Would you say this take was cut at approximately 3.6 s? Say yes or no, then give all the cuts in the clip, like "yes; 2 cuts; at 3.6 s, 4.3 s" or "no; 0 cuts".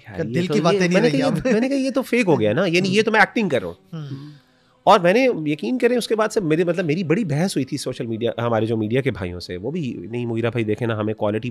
no; 0 cuts